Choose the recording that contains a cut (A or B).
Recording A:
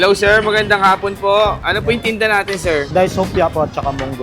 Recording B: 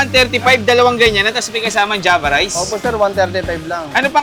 A